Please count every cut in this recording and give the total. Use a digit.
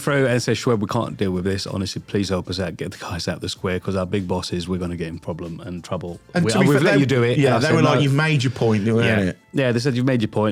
0